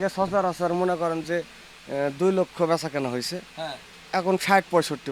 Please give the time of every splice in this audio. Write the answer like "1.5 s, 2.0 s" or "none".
none